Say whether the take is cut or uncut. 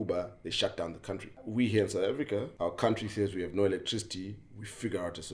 cut